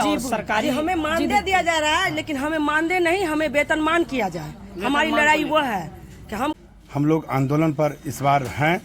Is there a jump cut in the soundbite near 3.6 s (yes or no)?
no